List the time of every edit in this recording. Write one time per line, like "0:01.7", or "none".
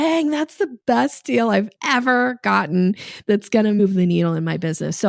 0:03.8